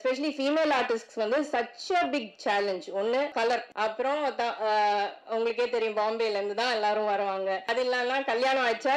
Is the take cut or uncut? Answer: uncut